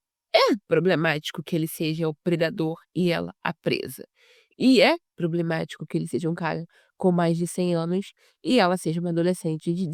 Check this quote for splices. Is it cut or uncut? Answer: uncut